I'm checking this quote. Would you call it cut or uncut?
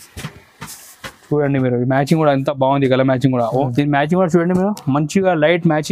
cut